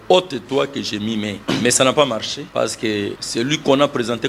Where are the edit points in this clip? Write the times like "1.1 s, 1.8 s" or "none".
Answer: 1.4 s, 2.4 s, 3.2 s